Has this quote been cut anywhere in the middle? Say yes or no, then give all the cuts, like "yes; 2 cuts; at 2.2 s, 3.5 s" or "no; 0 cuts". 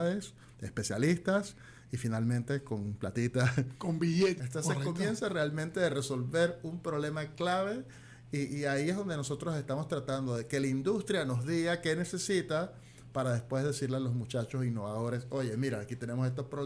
yes; 1 cut; at 4.4 s